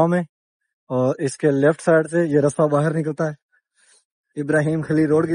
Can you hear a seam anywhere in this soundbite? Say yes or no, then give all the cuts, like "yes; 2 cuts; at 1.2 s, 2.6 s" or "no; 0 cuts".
no; 0 cuts